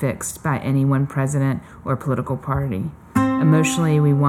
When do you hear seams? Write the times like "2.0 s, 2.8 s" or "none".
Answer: none